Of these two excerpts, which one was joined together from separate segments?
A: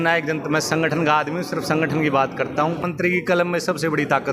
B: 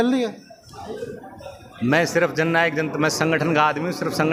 A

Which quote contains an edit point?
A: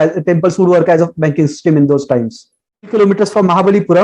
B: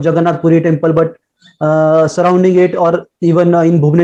A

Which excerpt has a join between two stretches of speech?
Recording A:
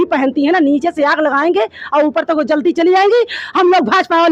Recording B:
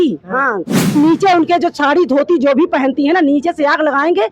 B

